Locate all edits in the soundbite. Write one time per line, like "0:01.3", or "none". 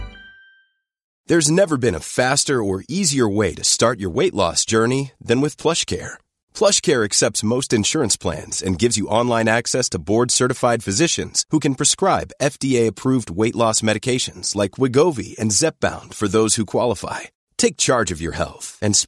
0:01.1